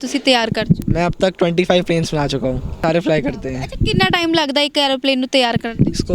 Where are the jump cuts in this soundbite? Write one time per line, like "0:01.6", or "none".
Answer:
0:02.8